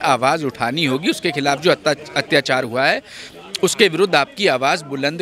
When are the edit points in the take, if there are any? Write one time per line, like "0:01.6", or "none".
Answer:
none